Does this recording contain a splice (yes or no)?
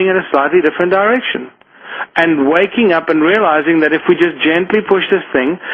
no